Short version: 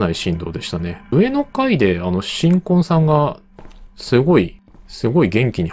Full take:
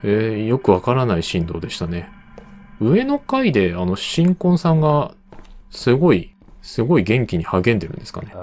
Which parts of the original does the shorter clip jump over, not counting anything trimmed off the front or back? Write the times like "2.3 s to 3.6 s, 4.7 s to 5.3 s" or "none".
2.2 s to 2.9 s